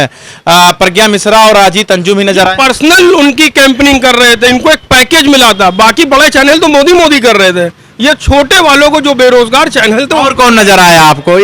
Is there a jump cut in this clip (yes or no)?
no